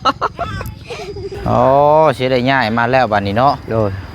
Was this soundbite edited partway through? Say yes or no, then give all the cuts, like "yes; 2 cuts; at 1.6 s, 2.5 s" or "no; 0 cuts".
yes; 1 cut; at 1.3 s